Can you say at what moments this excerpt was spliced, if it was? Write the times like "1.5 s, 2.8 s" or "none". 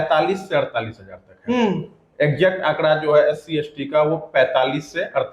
none